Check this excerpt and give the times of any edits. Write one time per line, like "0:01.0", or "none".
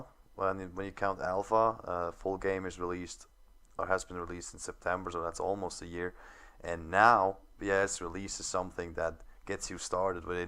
0:02.3